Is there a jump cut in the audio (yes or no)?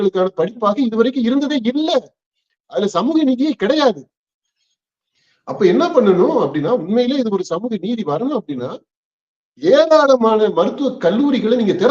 no